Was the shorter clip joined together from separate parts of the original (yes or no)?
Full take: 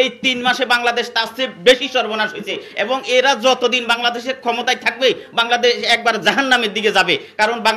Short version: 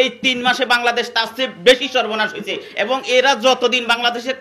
no